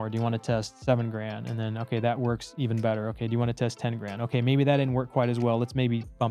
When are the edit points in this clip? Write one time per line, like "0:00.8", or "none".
none